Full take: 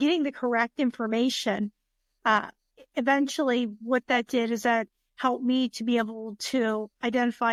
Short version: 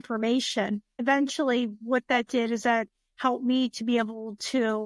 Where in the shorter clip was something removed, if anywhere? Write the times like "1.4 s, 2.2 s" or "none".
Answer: 0.9 s